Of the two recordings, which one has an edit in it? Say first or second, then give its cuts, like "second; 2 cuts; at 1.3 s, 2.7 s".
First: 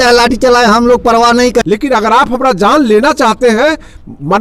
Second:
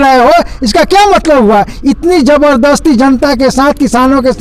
first; 1 cut; at 1.6 s